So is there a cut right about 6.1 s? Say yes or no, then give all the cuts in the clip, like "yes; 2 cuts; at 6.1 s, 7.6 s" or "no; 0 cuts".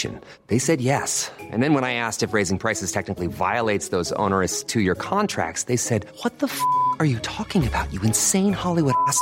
no; 0 cuts